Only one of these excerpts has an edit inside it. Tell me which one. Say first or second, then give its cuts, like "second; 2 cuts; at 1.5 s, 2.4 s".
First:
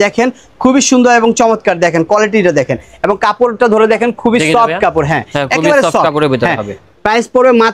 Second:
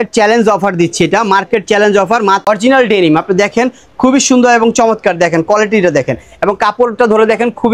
second; 1 cut; at 2.5 s